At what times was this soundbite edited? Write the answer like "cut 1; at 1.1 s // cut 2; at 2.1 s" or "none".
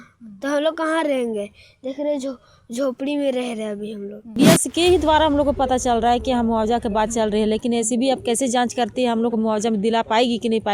cut 1; at 4.4 s